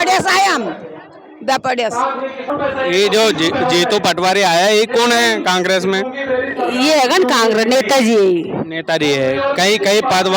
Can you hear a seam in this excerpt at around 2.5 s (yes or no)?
yes